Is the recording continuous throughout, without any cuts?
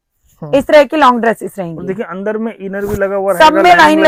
yes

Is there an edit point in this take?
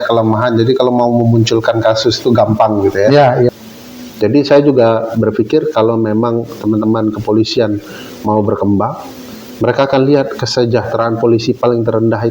yes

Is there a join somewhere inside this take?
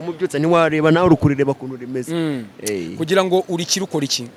no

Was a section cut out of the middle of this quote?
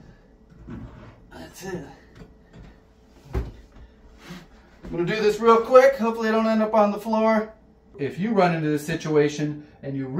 yes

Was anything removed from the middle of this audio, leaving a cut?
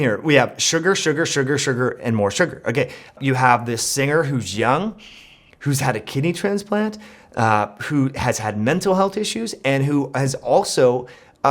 yes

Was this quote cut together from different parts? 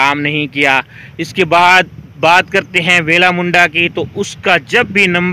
no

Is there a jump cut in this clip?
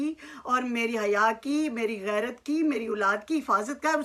no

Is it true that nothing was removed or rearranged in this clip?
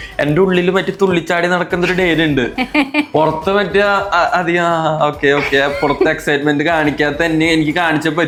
yes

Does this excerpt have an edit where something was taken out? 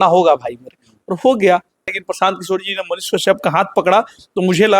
yes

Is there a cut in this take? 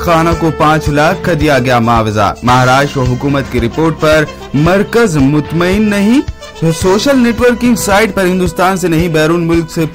no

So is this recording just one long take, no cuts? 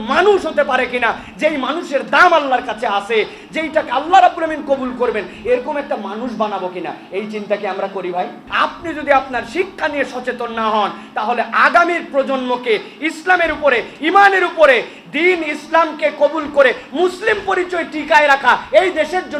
no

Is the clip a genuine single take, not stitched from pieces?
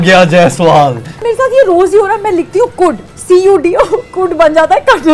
no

